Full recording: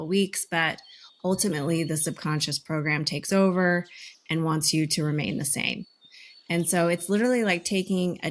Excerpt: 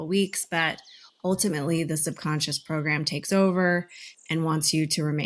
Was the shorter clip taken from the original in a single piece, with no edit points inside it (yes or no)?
yes